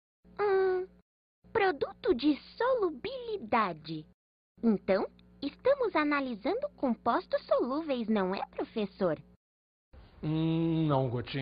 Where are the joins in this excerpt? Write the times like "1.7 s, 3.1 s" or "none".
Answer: 1.4 s